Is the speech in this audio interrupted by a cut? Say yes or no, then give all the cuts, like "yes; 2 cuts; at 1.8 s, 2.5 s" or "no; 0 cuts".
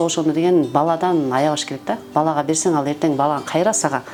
no; 0 cuts